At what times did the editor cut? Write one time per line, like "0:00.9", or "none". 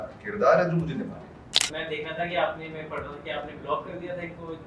0:01.7